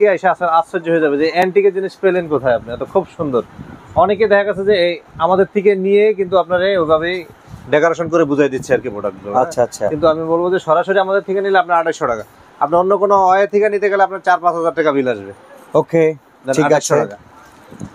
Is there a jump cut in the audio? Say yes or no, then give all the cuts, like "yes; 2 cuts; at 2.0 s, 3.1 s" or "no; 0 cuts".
no; 0 cuts